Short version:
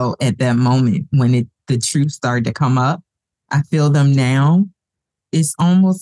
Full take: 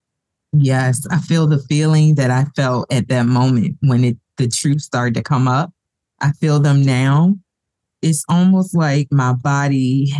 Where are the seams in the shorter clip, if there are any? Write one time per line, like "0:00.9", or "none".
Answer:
none